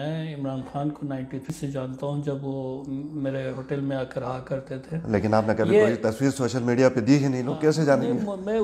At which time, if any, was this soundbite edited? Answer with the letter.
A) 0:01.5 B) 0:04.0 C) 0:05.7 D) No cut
A